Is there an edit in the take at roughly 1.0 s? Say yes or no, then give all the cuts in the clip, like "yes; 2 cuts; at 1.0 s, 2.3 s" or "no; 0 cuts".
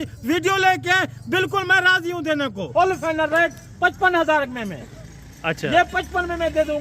no; 1 cut; at 2.7 s